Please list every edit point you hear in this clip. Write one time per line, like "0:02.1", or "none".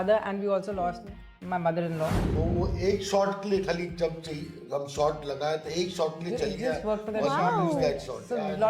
0:02.2